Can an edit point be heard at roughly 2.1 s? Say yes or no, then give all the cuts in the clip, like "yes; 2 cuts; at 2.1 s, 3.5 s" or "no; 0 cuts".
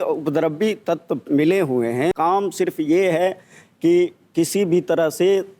yes; 1 cut; at 2.1 s